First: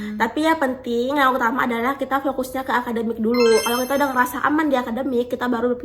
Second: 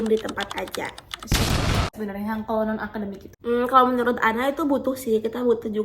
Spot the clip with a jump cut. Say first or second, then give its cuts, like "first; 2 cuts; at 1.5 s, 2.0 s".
second; 2 cuts; at 1.9 s, 3.2 s